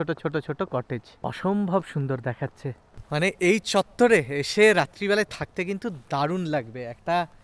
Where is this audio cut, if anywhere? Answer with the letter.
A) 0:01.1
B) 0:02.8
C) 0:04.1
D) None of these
A